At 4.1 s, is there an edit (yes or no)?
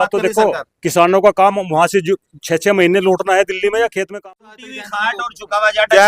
yes